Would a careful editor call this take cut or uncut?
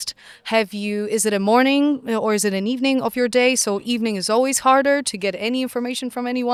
uncut